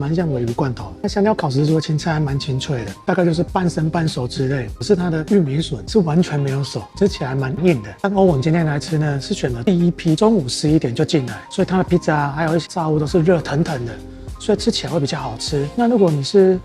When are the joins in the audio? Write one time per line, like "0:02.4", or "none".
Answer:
0:00.9
0:03.1
0:04.7
0:07.9
0:10.2
0:12.6